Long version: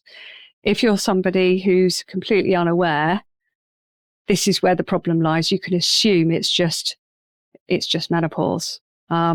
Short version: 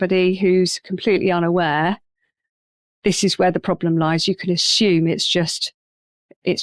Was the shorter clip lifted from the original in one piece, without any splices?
yes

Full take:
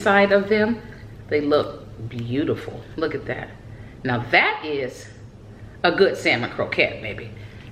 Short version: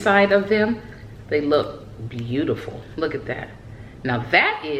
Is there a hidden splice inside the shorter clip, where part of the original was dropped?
no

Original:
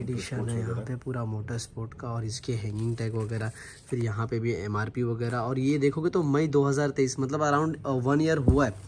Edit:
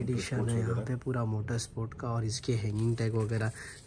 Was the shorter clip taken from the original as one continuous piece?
yes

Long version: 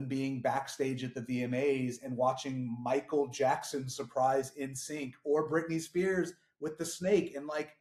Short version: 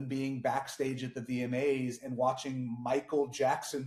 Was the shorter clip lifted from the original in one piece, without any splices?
yes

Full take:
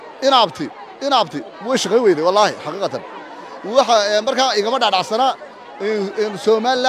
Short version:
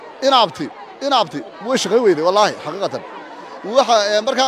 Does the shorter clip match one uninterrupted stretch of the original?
yes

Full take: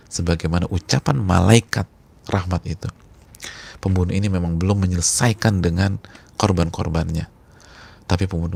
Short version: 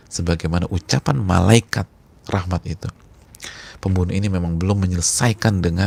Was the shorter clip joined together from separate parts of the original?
no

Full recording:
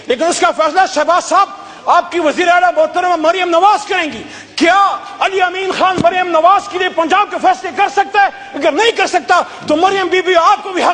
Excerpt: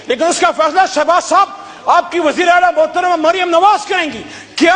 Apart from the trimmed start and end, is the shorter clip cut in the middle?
no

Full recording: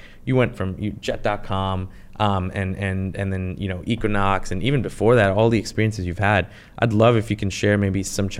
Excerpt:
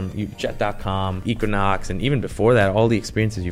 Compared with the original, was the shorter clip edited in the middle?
yes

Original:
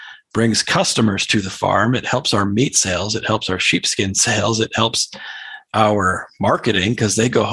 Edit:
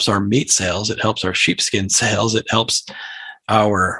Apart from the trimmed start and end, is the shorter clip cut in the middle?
no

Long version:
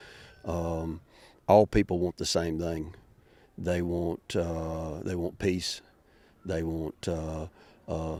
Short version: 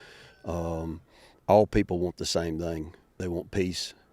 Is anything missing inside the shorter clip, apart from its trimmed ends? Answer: yes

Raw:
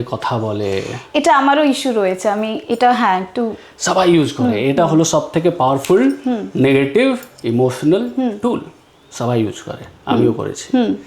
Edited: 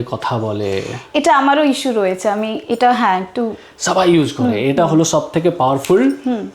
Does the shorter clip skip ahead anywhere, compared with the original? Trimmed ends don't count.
no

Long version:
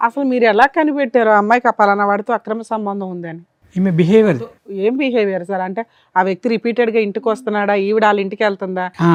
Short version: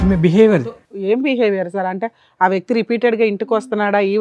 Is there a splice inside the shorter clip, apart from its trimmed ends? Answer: no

